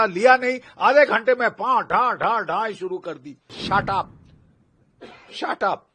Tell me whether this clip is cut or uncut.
cut